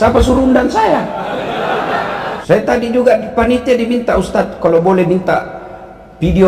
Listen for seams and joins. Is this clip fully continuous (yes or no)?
no